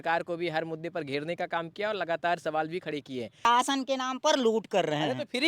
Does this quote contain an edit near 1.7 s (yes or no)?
no